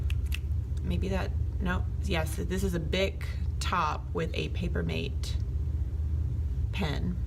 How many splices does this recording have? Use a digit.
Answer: 0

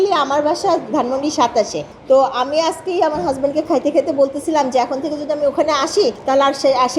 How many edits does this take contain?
2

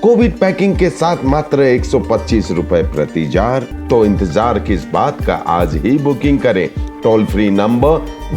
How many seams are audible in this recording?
1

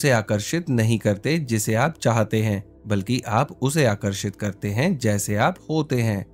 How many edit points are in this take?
0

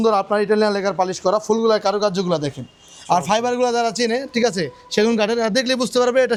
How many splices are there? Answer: 0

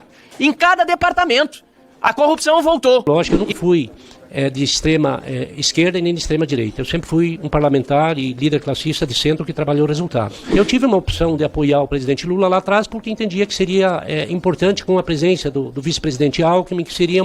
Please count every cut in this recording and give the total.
2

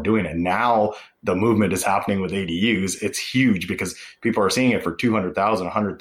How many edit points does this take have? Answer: 1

